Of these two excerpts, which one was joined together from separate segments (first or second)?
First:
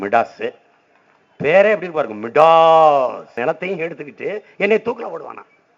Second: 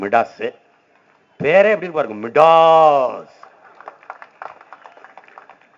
first